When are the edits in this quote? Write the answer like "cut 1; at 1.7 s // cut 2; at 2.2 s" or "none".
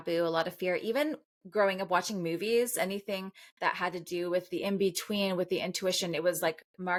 none